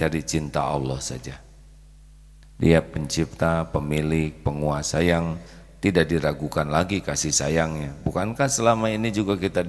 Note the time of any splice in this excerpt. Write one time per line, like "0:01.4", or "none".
none